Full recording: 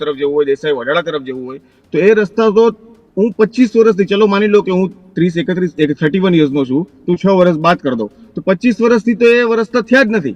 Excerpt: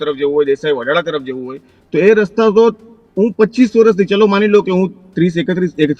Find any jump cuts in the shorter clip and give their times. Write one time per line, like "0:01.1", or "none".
none